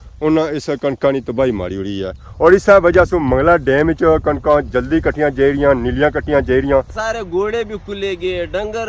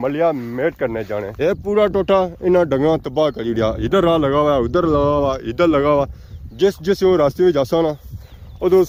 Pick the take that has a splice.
first; 2 cuts; at 2.2 s, 6.9 s

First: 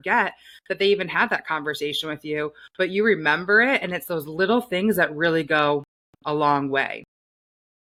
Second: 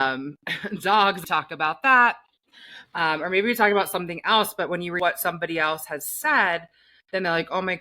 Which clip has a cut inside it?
second; 2 cuts; at 1.2 s, 4.9 s

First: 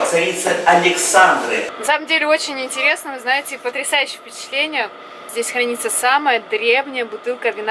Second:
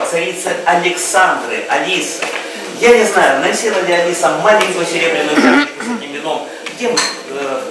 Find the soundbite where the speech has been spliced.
first; 2 cuts; at 1.6 s, 5.3 s

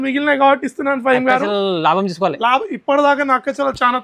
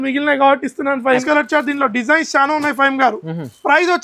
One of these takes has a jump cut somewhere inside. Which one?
second; 1 cut; at 1.2 s

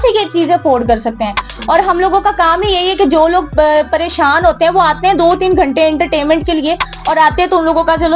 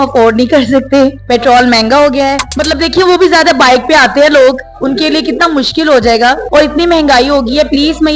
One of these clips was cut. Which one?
second; 3 cuts; at 1.2 s, 2.5 s, 6.4 s

